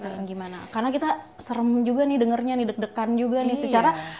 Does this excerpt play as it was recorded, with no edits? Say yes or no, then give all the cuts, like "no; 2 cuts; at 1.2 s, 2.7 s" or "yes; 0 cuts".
yes; 0 cuts